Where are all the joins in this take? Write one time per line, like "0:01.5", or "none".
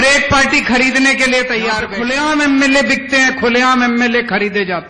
0:01.9

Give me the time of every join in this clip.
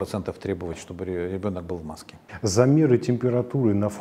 none

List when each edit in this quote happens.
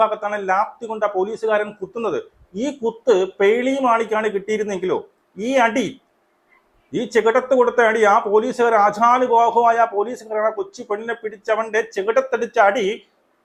none

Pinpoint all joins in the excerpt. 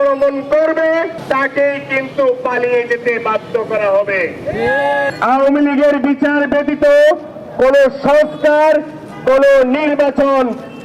0:01.2
0:05.1

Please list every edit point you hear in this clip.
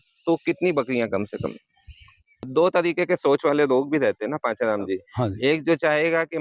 0:02.5

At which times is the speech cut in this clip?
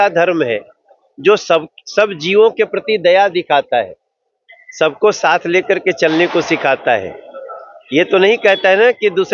none

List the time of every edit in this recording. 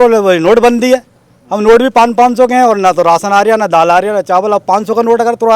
none

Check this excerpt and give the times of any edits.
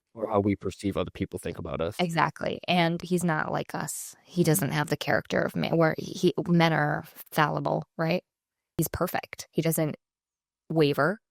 0:03.0
0:08.7

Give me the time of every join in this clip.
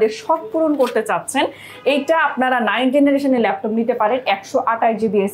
none

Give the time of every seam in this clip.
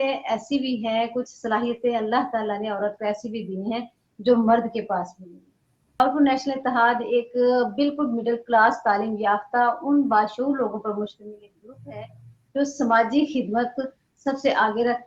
0:06.0

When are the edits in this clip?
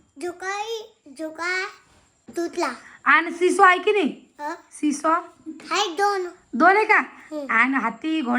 0:02.2

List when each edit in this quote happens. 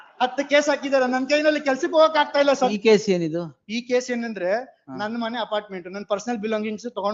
0:02.7

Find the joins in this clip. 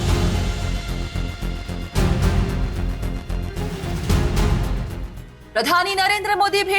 0:02.6

